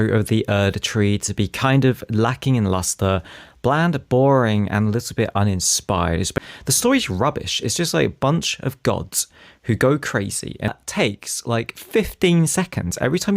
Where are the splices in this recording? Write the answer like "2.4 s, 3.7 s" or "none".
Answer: 6.3 s, 10.7 s